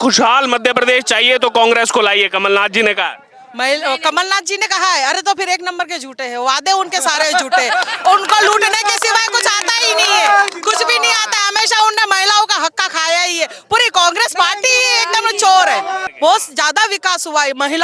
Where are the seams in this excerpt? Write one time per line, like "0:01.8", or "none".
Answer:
0:16.1